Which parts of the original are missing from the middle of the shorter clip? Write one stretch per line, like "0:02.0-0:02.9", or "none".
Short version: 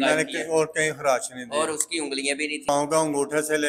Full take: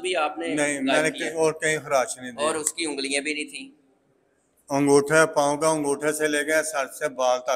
0:03.5-0:05.4